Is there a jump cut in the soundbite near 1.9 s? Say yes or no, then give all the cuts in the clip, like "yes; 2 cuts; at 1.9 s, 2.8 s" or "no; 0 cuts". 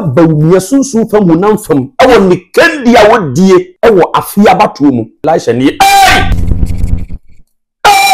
no; 3 cuts; at 3.7 s, 5.2 s, 6.3 s